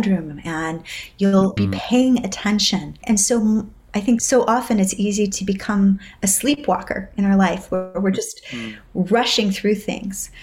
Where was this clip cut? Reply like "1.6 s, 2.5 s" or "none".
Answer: 1.5 s, 3.0 s, 4.2 s